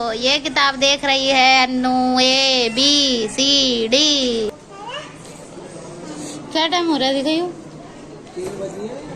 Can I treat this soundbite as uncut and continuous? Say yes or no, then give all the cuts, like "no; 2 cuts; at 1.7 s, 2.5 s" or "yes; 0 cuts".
no; 1 cut; at 4.6 s